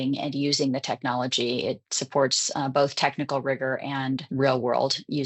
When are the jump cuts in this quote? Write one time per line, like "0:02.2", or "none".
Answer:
0:04.3